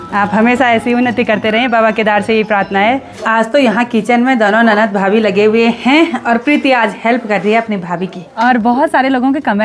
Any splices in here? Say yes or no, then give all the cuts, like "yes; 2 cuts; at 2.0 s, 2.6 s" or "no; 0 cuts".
yes; 2 cuts; at 3.1 s, 8.2 s